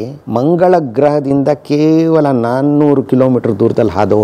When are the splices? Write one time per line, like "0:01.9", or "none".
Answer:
none